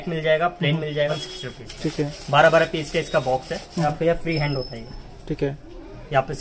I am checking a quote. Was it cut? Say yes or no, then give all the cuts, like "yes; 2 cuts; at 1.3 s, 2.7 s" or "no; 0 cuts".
yes; 2 cuts; at 1.1 s, 3.8 s